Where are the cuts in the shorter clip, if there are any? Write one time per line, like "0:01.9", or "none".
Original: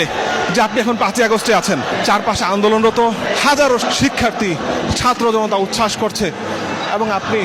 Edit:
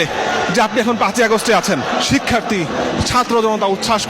0:01.9